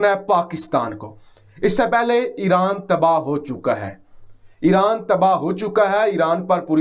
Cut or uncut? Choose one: uncut